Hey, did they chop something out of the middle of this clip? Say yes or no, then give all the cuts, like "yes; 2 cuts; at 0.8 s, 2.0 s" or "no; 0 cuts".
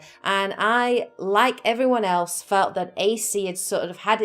yes; 1 cut; at 2.0 s